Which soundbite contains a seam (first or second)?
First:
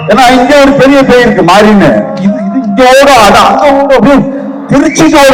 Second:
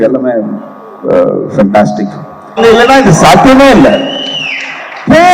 second